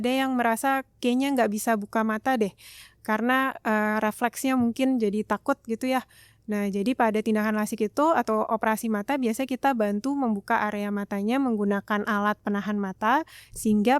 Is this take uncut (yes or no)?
yes